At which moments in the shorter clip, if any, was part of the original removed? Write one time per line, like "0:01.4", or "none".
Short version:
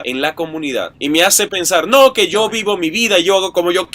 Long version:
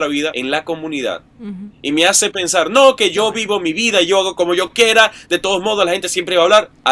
0:00.9